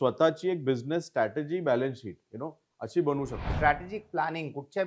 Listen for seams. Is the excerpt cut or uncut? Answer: cut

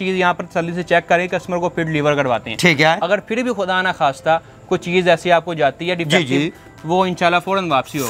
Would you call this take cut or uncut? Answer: uncut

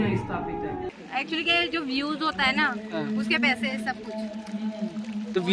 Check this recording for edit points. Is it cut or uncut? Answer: cut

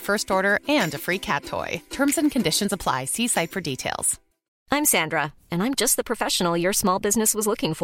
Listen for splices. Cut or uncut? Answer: cut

